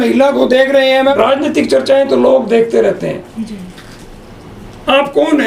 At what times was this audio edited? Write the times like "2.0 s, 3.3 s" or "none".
1.1 s